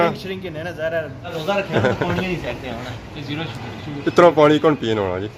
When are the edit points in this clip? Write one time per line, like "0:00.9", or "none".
0:01.3